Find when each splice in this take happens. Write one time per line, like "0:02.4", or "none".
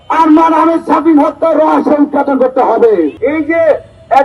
0:03.2